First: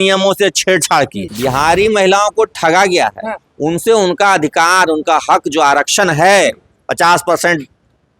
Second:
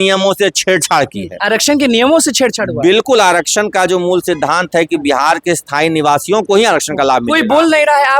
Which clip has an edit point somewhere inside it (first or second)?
first